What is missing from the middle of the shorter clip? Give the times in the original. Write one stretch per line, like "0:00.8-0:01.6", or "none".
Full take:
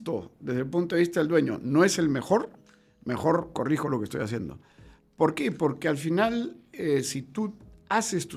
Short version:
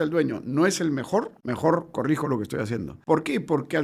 0:02.6-0:03.0
0:04.5-0:05.0